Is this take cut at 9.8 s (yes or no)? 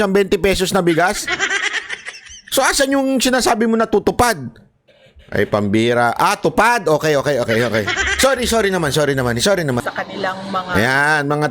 yes